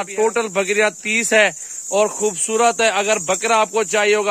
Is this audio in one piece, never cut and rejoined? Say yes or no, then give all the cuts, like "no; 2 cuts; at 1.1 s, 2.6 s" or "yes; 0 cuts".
yes; 0 cuts